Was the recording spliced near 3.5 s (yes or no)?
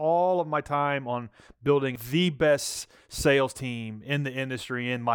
no